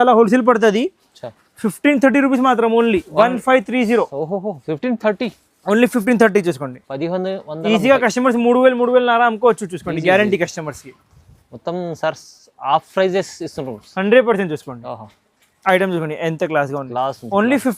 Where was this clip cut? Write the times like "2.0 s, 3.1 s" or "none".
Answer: none